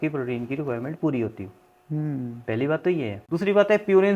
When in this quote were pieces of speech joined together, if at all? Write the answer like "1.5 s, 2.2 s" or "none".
3.2 s